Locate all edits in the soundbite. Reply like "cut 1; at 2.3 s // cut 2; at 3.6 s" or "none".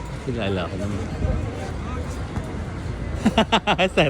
cut 1; at 1.7 s